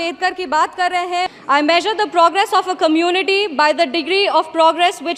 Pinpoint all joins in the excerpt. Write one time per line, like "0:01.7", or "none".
0:01.3